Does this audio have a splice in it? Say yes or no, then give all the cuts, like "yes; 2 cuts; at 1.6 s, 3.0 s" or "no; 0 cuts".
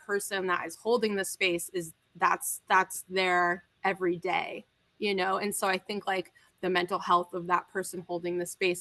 no; 0 cuts